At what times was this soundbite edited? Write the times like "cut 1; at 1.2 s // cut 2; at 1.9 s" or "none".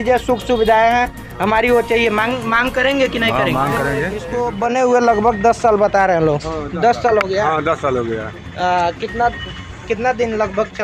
cut 1; at 4.3 s